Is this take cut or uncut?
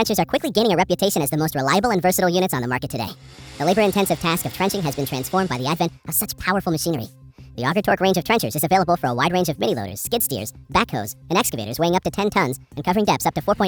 uncut